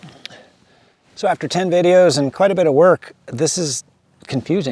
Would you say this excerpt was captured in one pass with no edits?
yes; 0 cuts

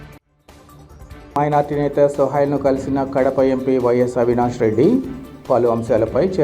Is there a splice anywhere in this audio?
no; 0 cuts

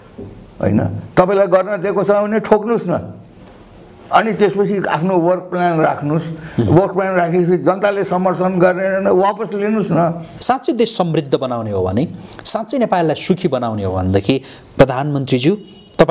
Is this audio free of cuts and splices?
no; 1 cut; at 10.3 s

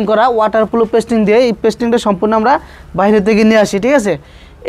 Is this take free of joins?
yes; 0 cuts

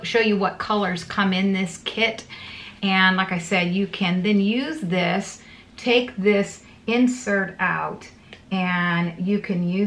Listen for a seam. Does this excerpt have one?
no; 0 cuts

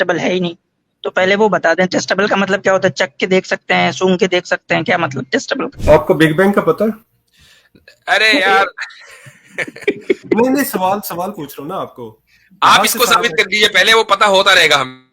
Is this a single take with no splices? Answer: no; 1 cut; at 5.8 s

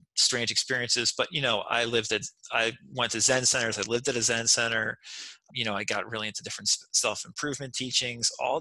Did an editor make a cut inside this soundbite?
yes; 1 cut; at 5.4 s

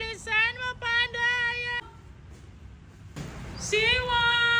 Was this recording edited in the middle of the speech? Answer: yes; 1 cut; at 1.8 s

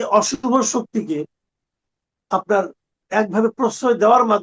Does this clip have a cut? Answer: no; 0 cuts

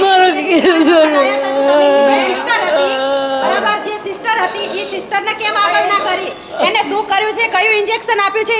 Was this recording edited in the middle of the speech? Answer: no; 0 cuts

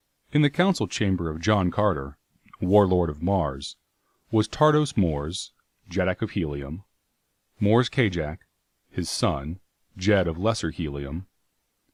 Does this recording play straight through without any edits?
yes; 0 cuts

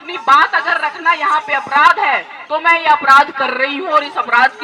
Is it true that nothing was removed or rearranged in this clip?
yes; 0 cuts

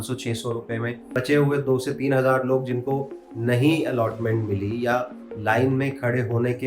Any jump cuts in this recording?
yes; 1 cut; at 1.0 s

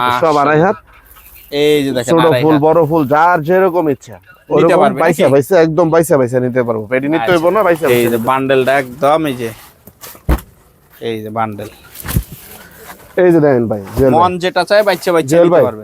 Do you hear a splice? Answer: yes; 1 cut; at 7.9 s

